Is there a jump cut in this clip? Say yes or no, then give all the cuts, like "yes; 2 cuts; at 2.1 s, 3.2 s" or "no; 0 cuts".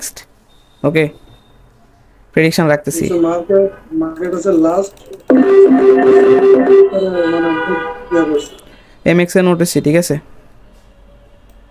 no; 0 cuts